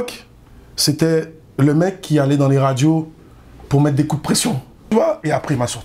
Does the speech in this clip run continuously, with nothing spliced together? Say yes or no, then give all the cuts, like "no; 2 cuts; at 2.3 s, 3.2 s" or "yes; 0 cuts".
no; 1 cut; at 4.7 s